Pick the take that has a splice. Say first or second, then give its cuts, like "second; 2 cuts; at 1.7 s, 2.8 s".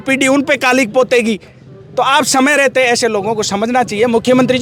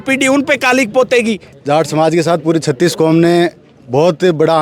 second; 1 cut; at 1.5 s